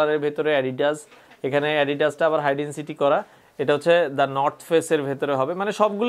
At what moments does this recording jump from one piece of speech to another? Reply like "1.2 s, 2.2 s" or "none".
3.4 s